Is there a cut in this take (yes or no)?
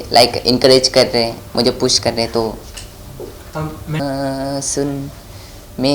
yes